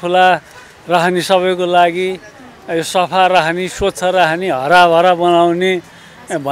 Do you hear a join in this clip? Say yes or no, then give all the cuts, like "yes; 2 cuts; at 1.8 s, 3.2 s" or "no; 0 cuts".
no; 0 cuts